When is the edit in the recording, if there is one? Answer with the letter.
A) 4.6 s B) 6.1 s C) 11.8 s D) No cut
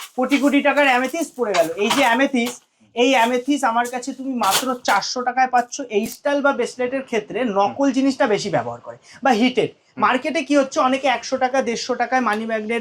B